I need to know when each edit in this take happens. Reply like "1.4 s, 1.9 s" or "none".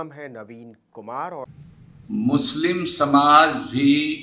1.5 s